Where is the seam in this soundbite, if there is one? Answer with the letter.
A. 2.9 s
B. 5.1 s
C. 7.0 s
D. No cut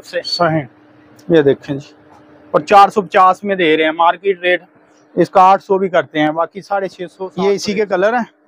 C